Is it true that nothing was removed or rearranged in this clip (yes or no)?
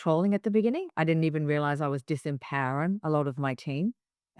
yes